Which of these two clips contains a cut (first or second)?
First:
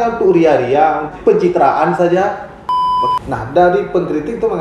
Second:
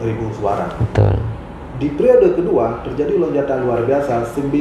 first